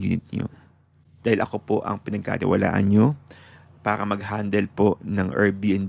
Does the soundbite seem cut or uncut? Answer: uncut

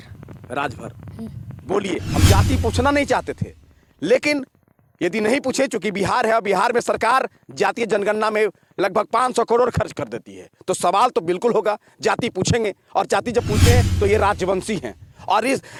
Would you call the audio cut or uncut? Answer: uncut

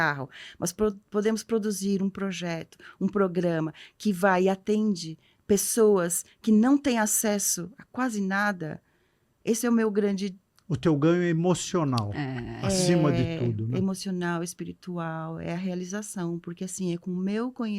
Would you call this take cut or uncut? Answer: uncut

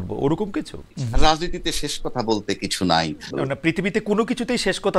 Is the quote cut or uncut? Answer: cut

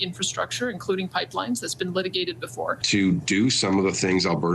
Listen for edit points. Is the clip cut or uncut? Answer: cut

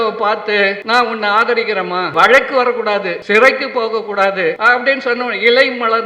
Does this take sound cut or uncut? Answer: cut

